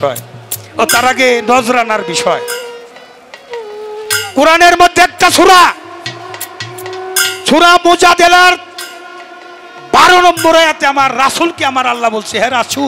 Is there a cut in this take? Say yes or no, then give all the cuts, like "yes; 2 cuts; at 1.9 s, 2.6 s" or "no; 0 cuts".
no; 0 cuts